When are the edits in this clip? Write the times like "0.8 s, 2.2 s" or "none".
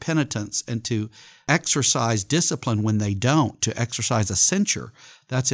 1.2 s